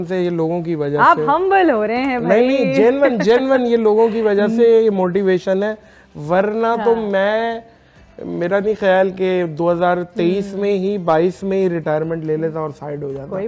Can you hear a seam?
no; 0 cuts

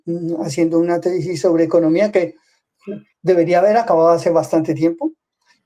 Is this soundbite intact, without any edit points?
yes; 0 cuts

